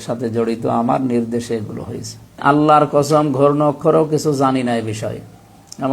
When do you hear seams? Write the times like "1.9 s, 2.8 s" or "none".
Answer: 2.4 s